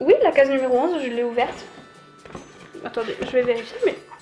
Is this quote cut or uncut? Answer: uncut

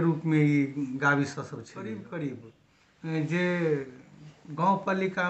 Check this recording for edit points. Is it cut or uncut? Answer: cut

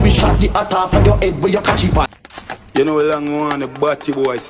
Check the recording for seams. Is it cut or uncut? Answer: cut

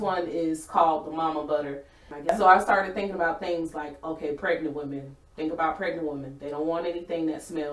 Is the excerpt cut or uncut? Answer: cut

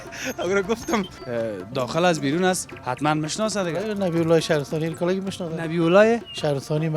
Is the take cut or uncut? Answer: cut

